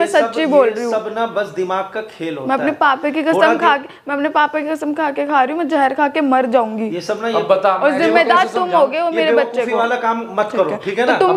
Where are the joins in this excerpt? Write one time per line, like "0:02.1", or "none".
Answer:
none